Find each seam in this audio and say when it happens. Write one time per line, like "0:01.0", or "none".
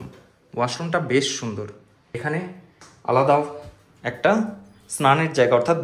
0:02.1